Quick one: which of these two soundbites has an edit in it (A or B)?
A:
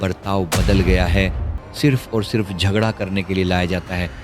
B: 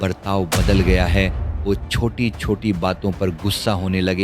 A